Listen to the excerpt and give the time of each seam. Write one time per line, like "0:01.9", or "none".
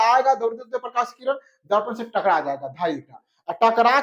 none